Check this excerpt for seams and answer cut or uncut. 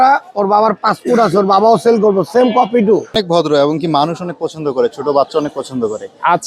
cut